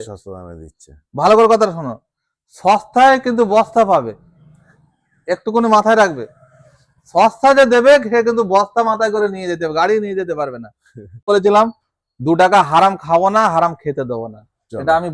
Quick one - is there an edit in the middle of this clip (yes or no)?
yes